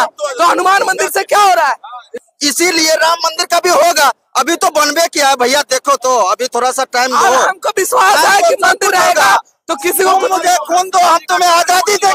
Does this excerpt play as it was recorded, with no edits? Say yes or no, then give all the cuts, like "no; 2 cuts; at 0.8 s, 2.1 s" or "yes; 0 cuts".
no; 1 cut; at 2.1 s